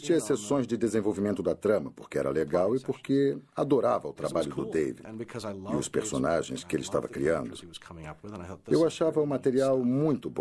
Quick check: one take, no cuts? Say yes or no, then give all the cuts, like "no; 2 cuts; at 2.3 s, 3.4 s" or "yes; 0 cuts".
no; 1 cut; at 4.5 s